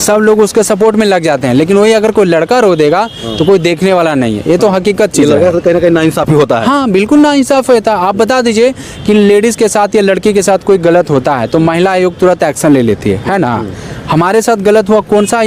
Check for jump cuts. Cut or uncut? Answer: uncut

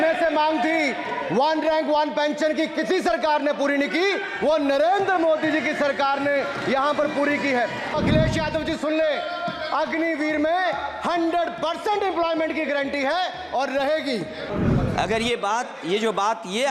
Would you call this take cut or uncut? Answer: cut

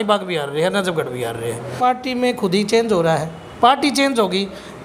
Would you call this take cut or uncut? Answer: cut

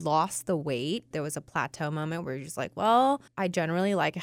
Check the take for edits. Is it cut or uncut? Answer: cut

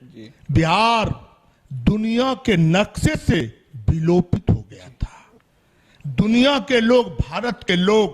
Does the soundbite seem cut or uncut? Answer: uncut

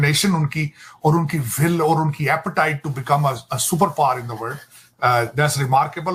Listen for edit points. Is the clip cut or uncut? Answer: uncut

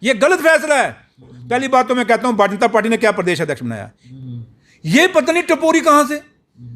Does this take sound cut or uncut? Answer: cut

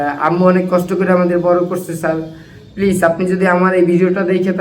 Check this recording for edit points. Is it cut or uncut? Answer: uncut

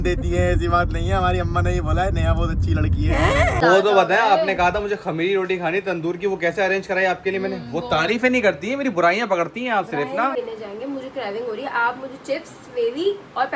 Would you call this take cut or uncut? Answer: cut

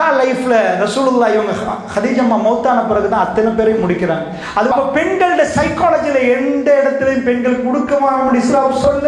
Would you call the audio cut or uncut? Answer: cut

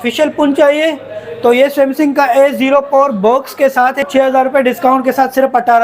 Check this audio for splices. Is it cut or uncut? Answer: cut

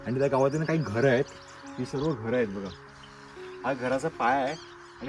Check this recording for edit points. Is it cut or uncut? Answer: uncut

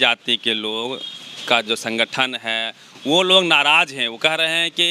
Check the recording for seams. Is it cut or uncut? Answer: uncut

